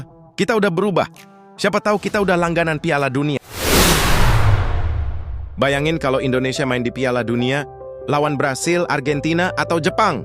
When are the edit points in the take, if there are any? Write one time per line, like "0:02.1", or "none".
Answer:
0:03.5
0:05.4